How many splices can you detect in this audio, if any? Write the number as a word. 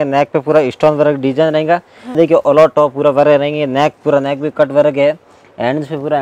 one